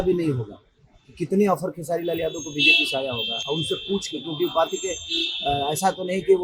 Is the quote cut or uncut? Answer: uncut